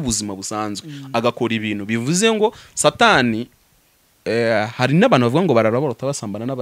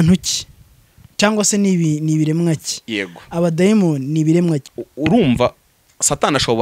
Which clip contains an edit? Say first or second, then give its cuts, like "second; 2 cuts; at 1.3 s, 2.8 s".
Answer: second; 1 cut; at 4.7 s